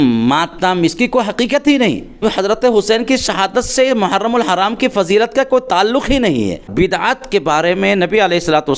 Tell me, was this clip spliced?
yes; 2 cuts; at 2.2 s, 6.7 s

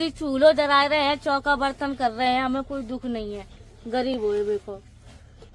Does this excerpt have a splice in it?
no; 0 cuts

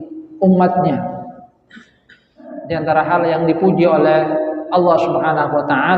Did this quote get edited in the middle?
yes; 1 cut; at 2.5 s

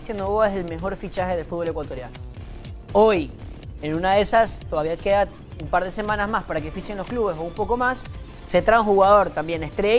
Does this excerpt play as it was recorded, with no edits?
yes; 0 cuts

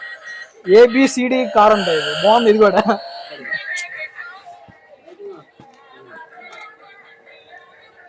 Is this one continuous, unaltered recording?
no; 1 cut; at 3.3 s

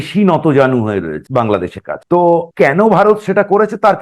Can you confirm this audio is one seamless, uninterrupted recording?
no; 2 cuts; at 1.2 s, 2.5 s

